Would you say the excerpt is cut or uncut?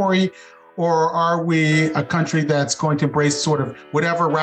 uncut